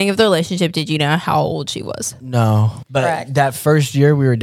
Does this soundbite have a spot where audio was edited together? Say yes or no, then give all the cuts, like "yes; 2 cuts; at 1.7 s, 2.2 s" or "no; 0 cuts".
yes; 1 cut; at 2.8 s